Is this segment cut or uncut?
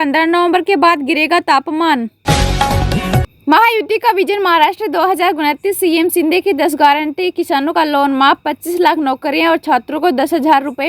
cut